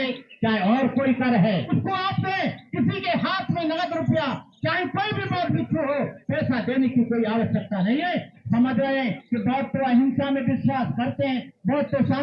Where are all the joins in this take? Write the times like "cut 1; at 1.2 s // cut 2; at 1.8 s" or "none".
cut 1; at 1.7 s // cut 2; at 8.4 s